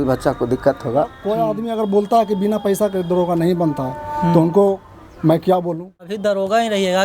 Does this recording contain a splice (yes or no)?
yes